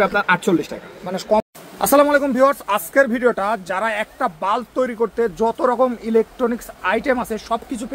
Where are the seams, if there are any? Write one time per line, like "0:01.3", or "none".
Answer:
0:01.2